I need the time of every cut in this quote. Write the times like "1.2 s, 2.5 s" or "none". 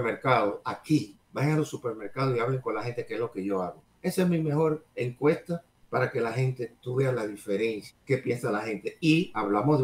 1.2 s, 3.8 s, 5.7 s, 7.9 s